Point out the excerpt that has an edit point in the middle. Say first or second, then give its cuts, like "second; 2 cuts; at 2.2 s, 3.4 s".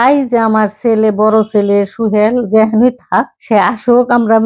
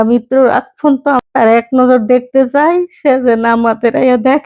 second; 1 cut; at 1.2 s